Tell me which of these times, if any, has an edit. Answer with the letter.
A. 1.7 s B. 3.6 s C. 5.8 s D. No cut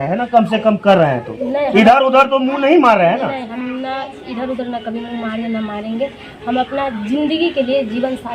D